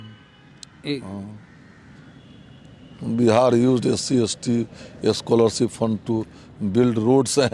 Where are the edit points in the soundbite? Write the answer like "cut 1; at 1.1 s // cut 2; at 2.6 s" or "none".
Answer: none